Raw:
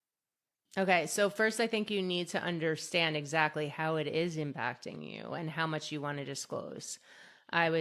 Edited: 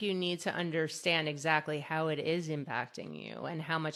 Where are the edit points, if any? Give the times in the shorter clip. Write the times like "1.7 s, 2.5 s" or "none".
none